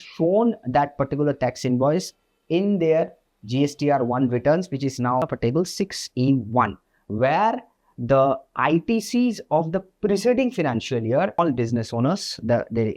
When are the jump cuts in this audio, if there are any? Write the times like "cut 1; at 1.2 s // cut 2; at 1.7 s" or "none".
cut 1; at 5.3 s // cut 2; at 11.4 s